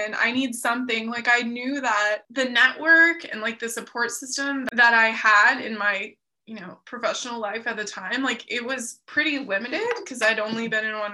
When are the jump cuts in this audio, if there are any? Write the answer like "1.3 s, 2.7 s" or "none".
2.3 s, 4.7 s